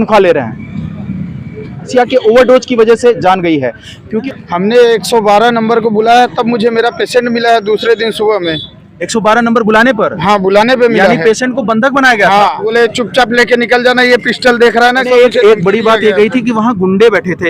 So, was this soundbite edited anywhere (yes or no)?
yes